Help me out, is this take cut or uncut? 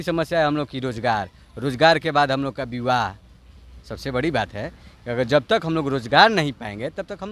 uncut